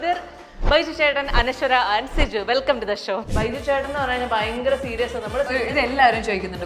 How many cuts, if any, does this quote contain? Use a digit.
2